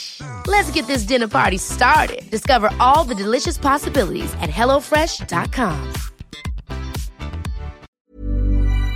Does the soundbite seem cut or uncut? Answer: cut